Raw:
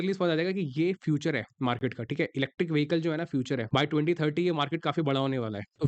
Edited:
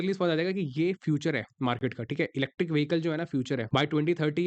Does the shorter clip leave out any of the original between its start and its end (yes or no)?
no